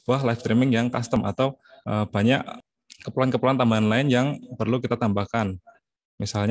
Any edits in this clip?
yes; 2 cuts; at 1.2 s, 2.5 s

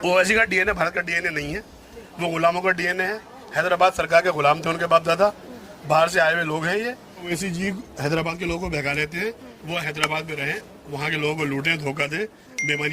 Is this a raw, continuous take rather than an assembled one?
no; 2 cuts; at 7.3 s, 9.5 s

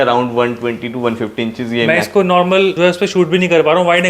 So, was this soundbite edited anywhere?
yes; 1 cut; at 2.7 s

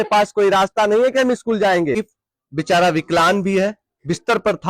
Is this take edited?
yes; 1 cut; at 2.1 s

